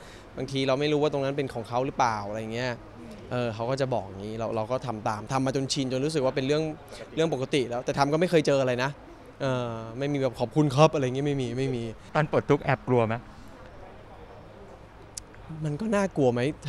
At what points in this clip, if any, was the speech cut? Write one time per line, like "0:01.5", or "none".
0:12.0

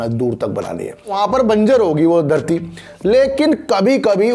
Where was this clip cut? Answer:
0:01.1

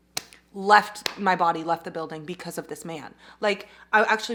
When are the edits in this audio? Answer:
none

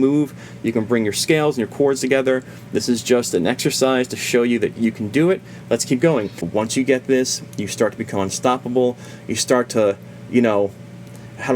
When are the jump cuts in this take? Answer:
0:06.4

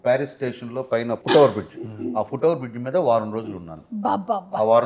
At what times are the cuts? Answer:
0:01.2

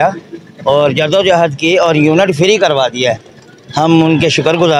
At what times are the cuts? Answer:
none

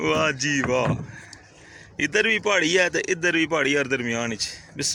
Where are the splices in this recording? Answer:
none

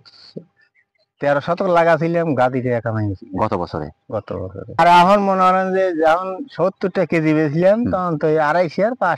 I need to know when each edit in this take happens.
0:04.7

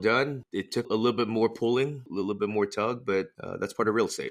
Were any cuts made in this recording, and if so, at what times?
0:00.8
0:02.0
0:03.4

